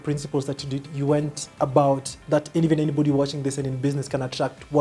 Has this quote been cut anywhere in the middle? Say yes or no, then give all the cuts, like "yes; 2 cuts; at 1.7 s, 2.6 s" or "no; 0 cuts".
no; 0 cuts